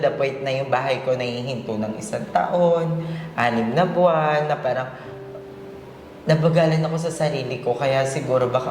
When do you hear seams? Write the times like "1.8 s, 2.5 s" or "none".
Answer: none